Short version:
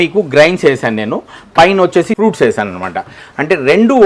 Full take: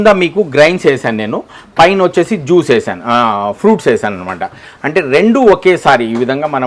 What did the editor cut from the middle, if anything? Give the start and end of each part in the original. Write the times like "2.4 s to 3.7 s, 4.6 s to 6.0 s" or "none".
2.4 s to 3.6 s